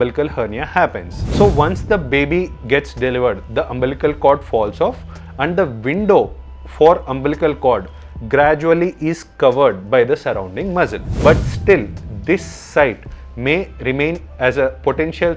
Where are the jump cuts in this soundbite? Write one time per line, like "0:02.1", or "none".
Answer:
0:01.2
0:11.0